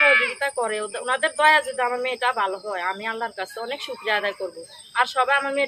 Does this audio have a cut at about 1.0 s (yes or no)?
yes